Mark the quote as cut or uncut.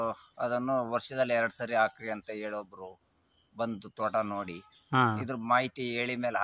uncut